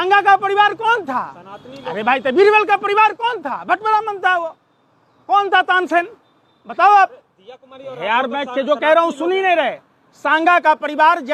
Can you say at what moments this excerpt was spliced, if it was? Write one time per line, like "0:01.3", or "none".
none